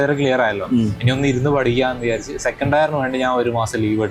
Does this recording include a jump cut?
no; 0 cuts

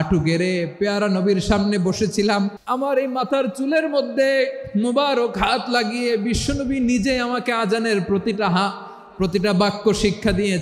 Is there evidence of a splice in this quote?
yes; 1 cut; at 2.6 s

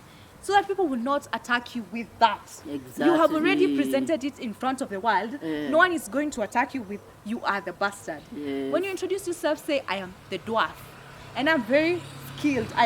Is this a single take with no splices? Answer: yes; 0 cuts

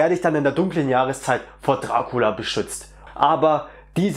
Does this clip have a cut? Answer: yes; 1 cut; at 3.0 s

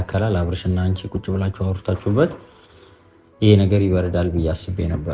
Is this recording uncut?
yes; 0 cuts

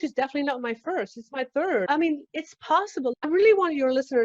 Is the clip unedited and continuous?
no; 2 cuts; at 1.9 s, 3.3 s

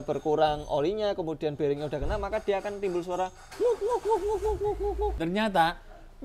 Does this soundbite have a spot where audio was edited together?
yes; 1 cut; at 5.2 s

